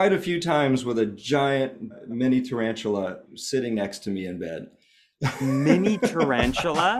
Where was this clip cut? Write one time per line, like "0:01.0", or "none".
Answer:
none